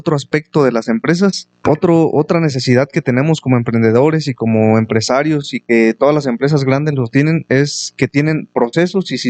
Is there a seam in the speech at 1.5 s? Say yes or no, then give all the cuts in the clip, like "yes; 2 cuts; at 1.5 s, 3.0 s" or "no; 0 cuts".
yes; 1 cut; at 1.5 s